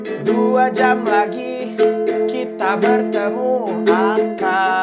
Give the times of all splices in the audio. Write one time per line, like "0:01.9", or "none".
none